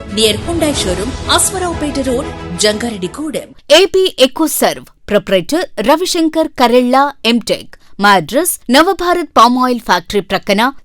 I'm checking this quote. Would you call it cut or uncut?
cut